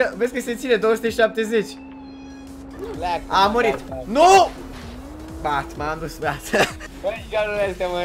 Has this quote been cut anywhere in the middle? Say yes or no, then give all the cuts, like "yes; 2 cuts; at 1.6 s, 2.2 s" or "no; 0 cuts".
yes; 1 cut; at 6.8 s